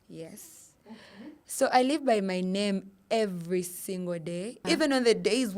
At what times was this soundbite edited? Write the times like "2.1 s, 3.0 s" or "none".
4.6 s